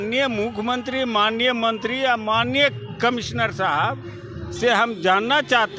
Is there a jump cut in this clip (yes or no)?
no